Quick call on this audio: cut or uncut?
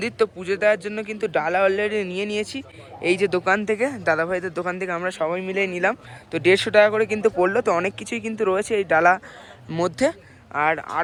uncut